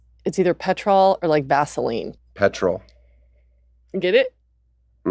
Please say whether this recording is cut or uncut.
cut